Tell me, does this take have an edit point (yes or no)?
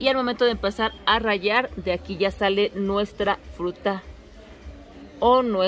no